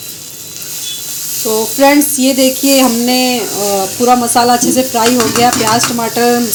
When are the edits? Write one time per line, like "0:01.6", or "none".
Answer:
none